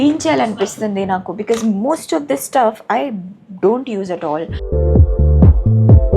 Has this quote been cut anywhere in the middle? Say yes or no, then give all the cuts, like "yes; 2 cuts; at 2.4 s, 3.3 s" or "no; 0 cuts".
yes; 1 cut; at 4.6 s